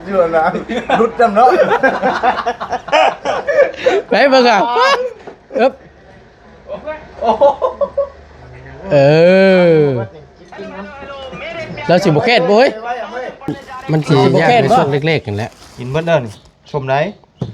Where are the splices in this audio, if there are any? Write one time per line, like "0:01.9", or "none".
0:14.8

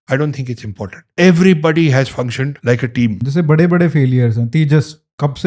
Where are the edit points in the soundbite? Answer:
0:01.0
0:02.5
0:03.2

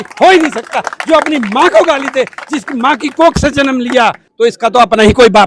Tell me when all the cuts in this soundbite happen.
0:04.2

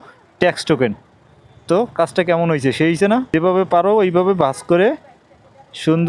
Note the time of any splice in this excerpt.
0:03.3

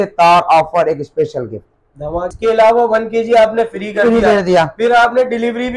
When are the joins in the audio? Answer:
0:02.3

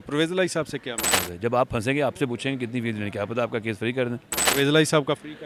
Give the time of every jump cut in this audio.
0:01.2
0:04.4

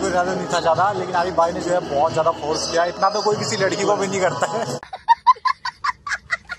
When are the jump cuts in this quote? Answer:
0:04.9

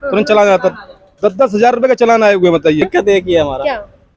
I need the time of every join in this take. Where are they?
0:02.8

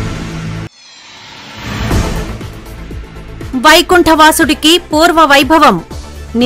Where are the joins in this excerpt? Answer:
0:03.4

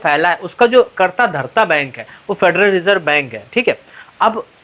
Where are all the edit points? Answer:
none

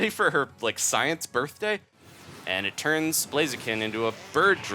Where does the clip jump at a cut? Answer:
0:01.9

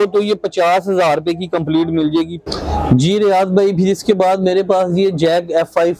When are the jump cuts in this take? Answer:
0:02.4

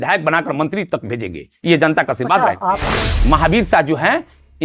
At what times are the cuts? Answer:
0:03.0

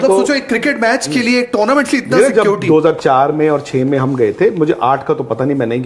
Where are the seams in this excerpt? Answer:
none

